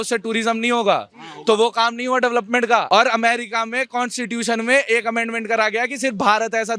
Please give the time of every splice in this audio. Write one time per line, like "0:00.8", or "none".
0:02.9